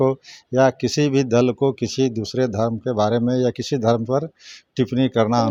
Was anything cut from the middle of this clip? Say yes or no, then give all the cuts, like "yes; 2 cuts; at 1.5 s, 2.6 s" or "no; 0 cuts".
no; 0 cuts